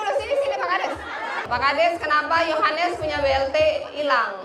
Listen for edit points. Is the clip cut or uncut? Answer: cut